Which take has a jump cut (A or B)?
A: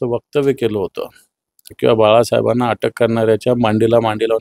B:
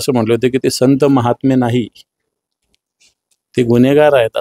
A